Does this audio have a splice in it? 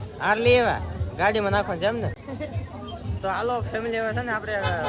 no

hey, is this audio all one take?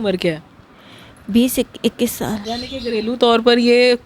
no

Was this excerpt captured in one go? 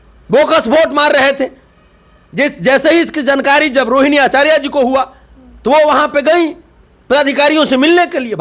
yes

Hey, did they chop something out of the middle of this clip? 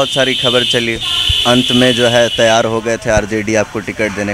no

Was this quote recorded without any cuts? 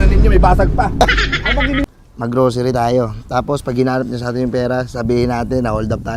no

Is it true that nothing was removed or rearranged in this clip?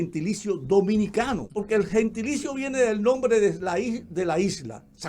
no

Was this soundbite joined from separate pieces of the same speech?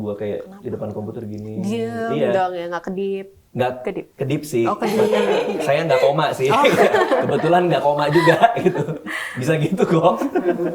no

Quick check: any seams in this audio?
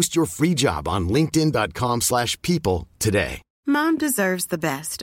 yes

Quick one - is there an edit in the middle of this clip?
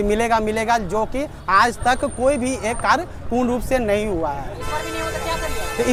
no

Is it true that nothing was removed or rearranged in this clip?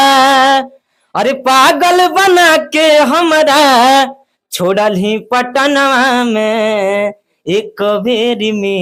yes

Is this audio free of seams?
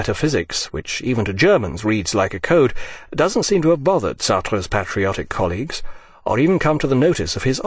no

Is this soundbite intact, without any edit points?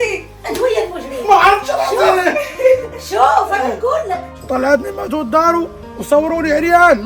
no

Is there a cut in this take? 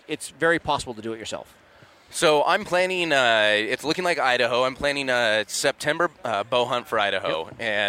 no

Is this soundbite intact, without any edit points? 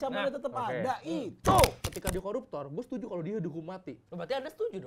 no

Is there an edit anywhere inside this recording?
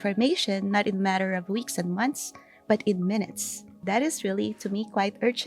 yes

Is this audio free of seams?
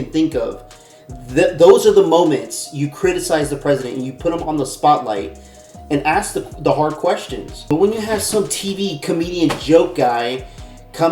yes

